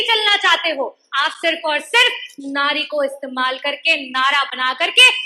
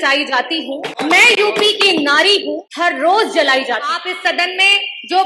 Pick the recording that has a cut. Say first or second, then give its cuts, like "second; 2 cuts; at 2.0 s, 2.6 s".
second; 3 cuts; at 0.9 s, 2.6 s, 4.1 s